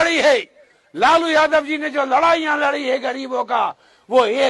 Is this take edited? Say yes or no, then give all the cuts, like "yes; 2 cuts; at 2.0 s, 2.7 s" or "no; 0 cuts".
no; 0 cuts